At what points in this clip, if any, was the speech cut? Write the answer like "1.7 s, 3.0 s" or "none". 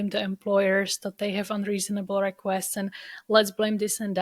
none